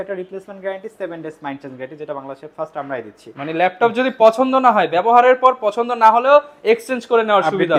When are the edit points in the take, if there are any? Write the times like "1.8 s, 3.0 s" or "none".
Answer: none

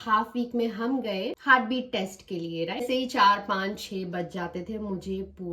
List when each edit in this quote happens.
1.4 s, 2.8 s

